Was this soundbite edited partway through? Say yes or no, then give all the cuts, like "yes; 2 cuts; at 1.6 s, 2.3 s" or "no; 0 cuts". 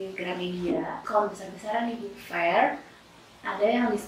yes; 1 cut; at 1.0 s